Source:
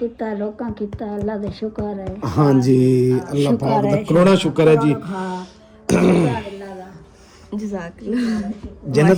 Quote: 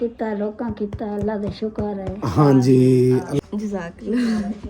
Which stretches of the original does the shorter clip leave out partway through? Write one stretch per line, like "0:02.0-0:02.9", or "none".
0:03.3-0:07.3